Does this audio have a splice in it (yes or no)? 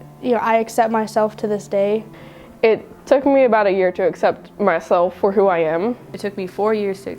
yes